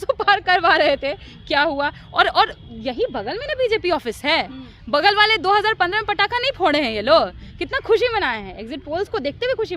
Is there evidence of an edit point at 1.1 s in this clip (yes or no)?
no